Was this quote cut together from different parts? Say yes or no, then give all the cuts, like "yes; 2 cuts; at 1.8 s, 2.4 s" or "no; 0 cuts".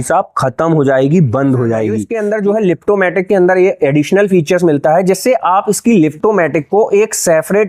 yes; 1 cut; at 2.1 s